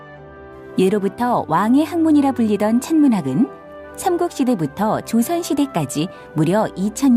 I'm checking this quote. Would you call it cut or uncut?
cut